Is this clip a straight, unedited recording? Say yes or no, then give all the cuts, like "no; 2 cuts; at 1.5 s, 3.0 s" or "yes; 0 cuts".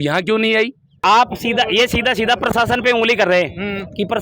no; 1 cut; at 1.0 s